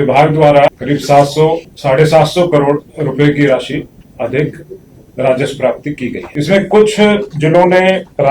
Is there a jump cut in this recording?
yes; 4 cuts; at 0.8 s, 1.7 s, 2.9 s, 6.2 s

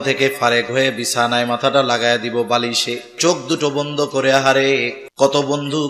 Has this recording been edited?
yes; 2 cuts; at 3.2 s, 5.0 s

